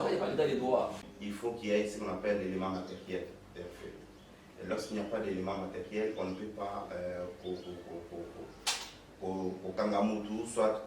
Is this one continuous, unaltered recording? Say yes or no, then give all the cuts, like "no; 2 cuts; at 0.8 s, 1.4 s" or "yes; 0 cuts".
no; 1 cut; at 1.0 s